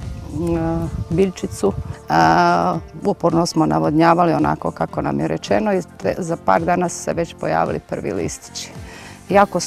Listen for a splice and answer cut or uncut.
cut